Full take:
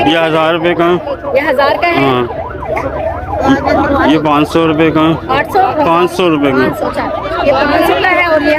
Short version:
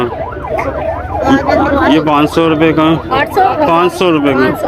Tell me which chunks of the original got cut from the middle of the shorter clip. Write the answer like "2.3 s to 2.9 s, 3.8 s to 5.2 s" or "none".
none